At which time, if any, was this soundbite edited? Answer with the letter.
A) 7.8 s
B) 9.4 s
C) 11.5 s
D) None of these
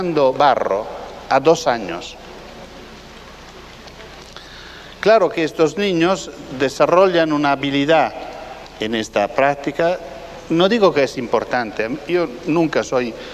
C